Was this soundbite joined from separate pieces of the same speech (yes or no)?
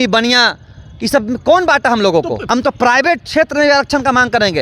yes